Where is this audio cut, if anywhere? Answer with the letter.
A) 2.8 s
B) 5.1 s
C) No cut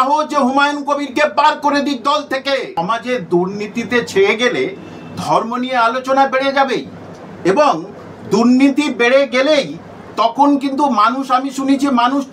A